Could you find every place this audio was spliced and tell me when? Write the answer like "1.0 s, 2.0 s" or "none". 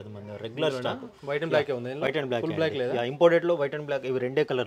none